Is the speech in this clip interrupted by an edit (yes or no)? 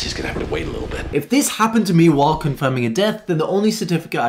yes